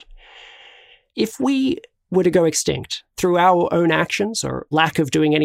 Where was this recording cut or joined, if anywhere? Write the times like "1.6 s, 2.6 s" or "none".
1.0 s, 3.1 s, 4.7 s

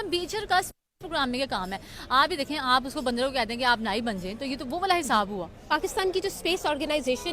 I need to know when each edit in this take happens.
5.7 s

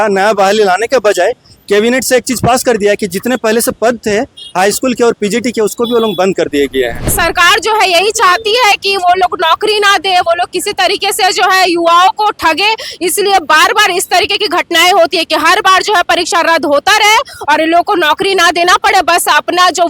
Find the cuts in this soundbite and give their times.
7.1 s

